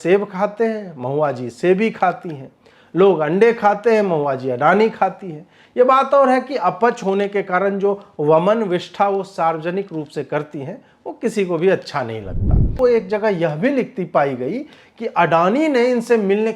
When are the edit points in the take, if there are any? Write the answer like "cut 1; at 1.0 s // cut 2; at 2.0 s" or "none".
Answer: cut 1; at 12.8 s